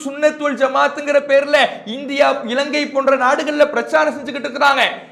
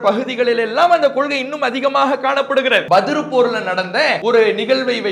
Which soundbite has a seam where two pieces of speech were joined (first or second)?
second